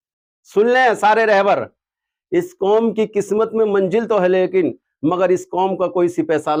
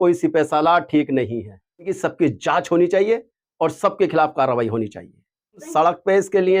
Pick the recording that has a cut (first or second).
second